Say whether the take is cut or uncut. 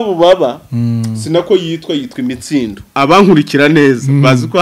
cut